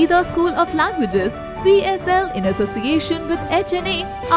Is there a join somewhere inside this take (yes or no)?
no